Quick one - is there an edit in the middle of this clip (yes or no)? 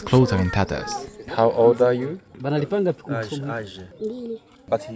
yes